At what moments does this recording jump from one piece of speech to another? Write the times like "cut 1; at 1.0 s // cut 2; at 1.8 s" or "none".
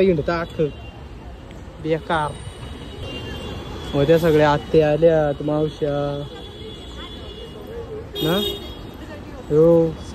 cut 1; at 3.0 s